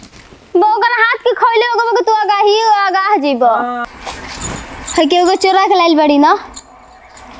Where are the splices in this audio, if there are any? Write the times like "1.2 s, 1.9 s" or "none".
3.8 s